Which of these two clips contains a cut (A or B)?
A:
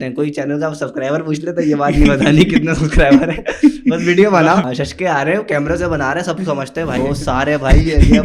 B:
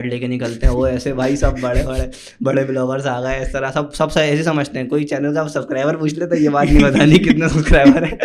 A